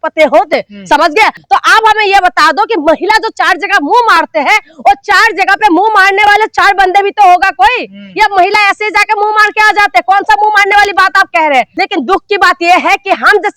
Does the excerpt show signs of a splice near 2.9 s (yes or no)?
no